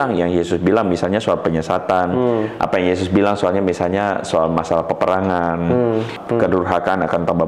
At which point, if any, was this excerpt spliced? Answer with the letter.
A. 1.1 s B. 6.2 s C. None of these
B